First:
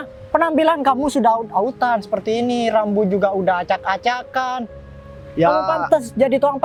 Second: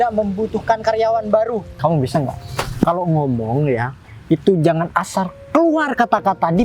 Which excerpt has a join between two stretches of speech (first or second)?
second